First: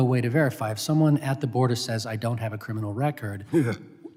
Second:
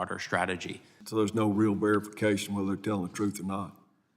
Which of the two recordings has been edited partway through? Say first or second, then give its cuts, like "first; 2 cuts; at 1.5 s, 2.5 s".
second; 1 cut; at 1.0 s